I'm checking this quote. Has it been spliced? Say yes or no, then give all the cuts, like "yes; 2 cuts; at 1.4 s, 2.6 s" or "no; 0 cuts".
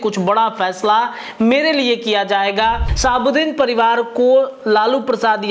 yes; 1 cut; at 2.9 s